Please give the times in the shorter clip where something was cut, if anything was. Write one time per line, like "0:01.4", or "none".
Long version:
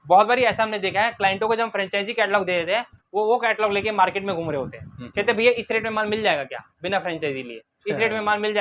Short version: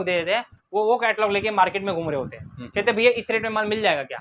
none